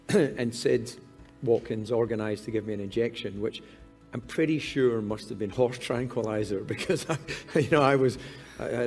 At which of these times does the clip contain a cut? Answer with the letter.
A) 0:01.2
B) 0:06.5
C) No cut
C